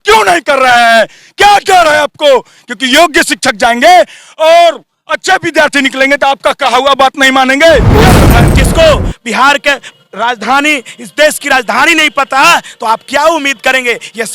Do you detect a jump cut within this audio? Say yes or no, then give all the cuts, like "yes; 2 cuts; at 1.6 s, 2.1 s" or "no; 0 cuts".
yes; 1 cut; at 8.4 s